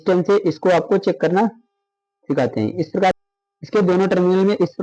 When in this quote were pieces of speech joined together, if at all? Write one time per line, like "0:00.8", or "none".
0:03.1